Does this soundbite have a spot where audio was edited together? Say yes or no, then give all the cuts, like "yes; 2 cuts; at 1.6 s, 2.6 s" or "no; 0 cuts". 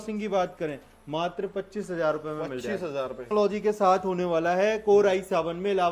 yes; 1 cut; at 3.3 s